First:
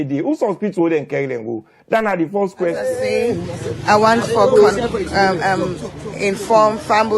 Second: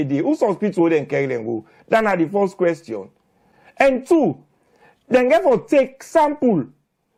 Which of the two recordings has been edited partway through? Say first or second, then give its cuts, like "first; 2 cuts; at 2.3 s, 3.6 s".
first; 1 cut; at 2.9 s